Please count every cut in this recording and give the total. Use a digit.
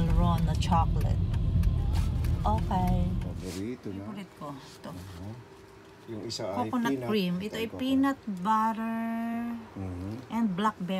2